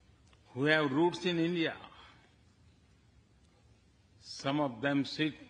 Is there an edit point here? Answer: no; 0 cuts

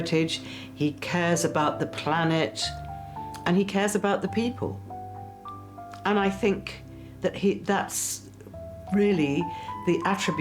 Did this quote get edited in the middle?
no; 0 cuts

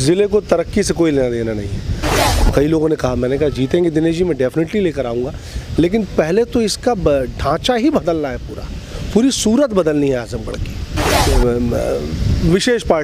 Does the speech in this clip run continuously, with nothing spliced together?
no; 2 cuts; at 2.2 s, 11.2 s

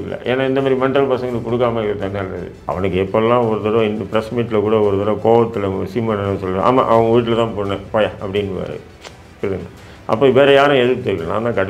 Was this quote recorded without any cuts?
no; 1 cut; at 2.6 s

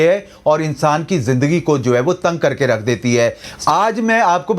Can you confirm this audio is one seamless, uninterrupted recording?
no; 1 cut; at 3.6 s

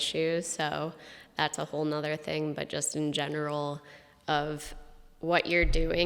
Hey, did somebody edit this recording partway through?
no; 0 cuts

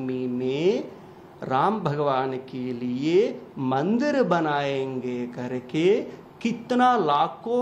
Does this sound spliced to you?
no; 0 cuts

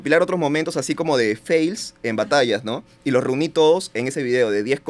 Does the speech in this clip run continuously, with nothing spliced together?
yes; 0 cuts

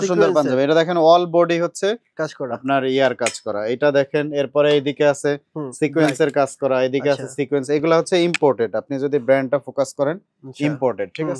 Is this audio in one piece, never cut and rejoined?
yes; 0 cuts

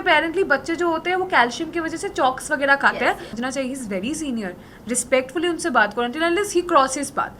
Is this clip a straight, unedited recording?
no; 1 cut; at 3.3 s

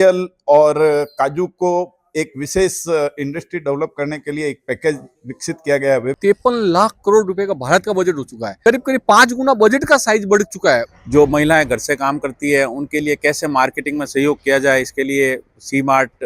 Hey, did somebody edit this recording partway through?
yes; 3 cuts; at 6.1 s, 8.4 s, 10.9 s

